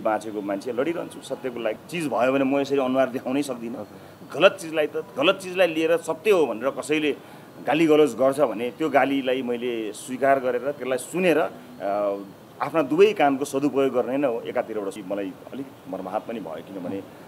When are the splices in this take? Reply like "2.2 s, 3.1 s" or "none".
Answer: 1.9 s, 15.0 s